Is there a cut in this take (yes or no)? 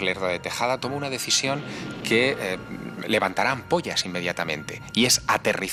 no